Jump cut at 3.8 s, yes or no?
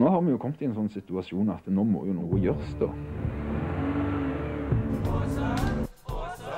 no